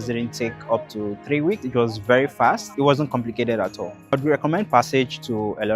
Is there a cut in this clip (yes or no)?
yes